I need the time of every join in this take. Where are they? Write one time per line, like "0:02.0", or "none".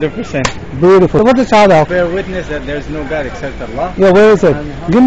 0:01.2
0:01.9